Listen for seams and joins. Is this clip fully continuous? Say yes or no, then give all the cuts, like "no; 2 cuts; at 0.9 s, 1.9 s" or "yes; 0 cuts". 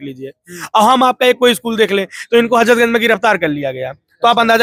yes; 0 cuts